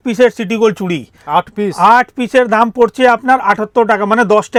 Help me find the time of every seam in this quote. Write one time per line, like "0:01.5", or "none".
none